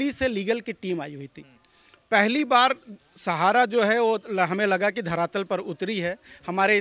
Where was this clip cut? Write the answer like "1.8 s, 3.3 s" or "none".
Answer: none